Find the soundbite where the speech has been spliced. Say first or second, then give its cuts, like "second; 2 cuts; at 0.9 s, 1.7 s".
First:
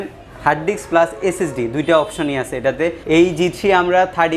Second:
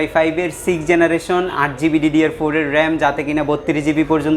first; 1 cut; at 3.0 s